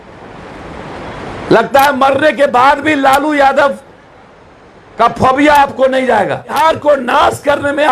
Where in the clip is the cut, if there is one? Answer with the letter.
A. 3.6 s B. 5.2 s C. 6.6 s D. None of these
C